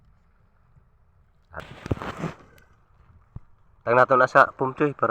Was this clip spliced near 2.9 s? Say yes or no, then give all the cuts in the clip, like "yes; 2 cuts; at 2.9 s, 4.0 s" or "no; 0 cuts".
no; 1 cut; at 1.6 s